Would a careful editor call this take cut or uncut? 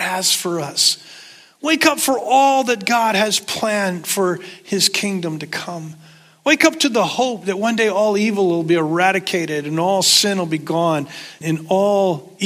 cut